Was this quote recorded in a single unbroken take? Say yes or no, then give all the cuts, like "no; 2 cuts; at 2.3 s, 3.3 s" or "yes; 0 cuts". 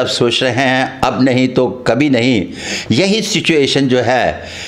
yes; 0 cuts